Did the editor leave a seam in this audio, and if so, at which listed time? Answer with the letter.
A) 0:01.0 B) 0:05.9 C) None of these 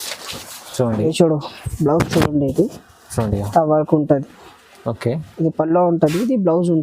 A